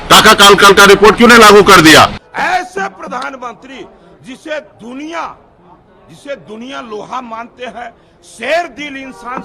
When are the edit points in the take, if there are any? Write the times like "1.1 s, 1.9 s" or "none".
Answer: 2.1 s